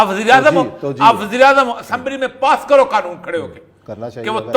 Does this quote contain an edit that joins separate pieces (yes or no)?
no